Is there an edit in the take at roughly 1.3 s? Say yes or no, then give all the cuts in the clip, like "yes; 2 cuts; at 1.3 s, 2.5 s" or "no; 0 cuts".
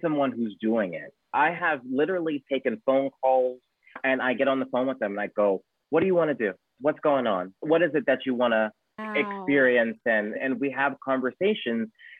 yes; 2 cuts; at 1.3 s, 4.0 s